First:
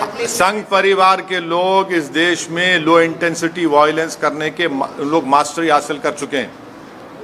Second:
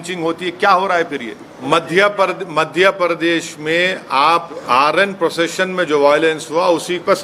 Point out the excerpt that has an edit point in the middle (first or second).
second